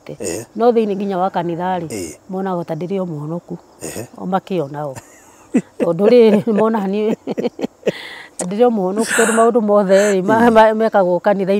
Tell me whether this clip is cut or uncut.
uncut